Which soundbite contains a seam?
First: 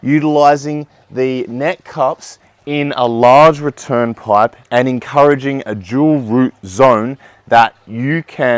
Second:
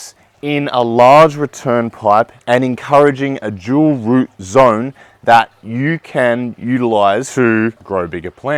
second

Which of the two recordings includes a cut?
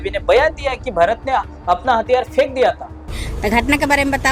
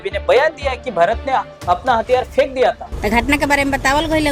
second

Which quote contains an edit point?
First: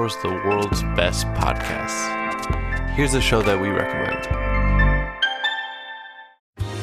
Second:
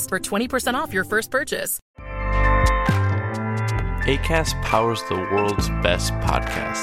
second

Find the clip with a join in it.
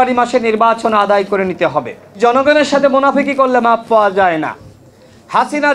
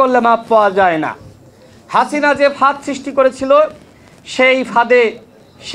first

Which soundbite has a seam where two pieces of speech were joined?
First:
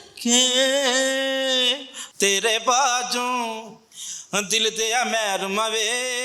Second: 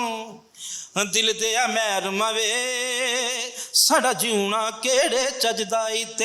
first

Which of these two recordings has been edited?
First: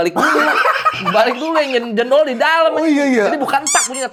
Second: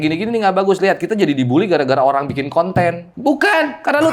second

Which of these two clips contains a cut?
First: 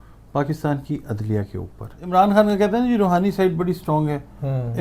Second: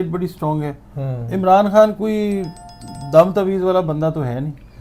first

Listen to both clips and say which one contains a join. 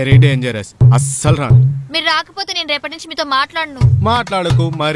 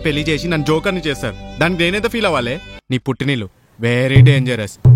second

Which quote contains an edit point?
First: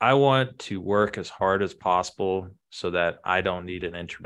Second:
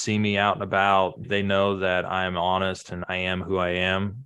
second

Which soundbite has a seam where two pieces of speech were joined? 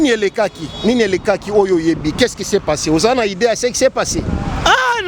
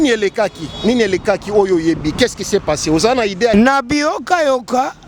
second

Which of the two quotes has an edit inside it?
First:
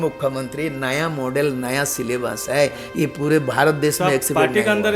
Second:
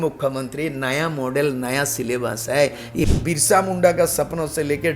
second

